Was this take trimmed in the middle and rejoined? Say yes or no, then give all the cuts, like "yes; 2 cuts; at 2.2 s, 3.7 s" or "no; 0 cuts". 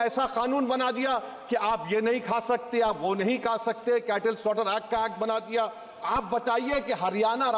yes; 1 cut; at 5.9 s